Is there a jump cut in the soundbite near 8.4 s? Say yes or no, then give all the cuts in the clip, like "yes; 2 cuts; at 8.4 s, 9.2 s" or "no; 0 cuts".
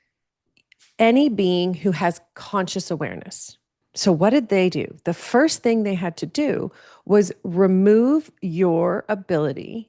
no; 1 cut; at 3.9 s